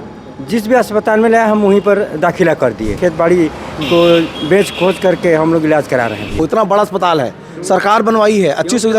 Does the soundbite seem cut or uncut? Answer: cut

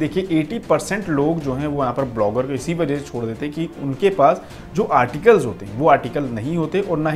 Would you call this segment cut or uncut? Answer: uncut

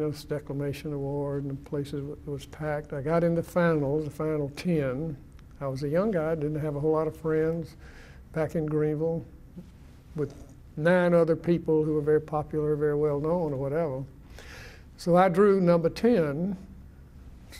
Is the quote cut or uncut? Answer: uncut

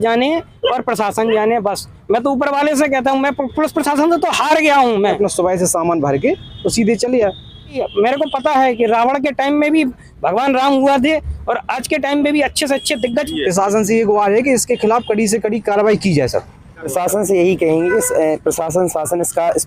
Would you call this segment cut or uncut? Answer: cut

